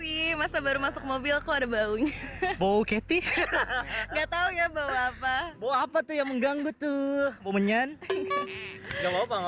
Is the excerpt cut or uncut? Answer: uncut